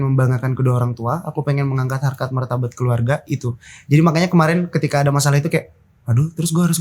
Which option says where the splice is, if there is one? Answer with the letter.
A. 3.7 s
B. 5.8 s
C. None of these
C